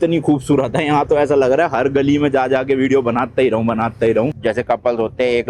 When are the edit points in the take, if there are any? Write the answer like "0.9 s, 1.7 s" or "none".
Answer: 4.4 s